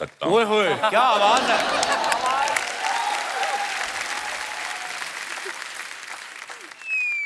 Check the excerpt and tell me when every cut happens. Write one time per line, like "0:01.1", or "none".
none

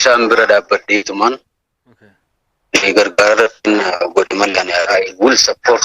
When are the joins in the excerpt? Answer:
0:04.9

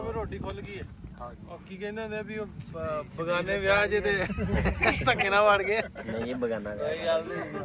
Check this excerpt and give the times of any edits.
none

